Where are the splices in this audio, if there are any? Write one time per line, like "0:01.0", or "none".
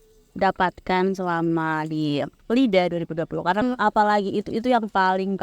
0:02.4
0:03.6